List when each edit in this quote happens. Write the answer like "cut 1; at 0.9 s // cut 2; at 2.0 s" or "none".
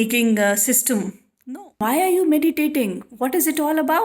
cut 1; at 1.8 s